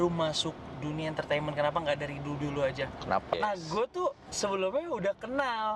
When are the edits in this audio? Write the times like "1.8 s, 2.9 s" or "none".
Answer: 3.3 s